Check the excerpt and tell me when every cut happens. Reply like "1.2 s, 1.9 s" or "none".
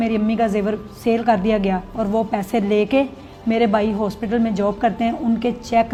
none